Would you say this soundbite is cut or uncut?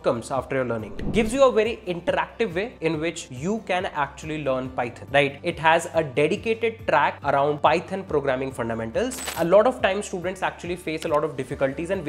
cut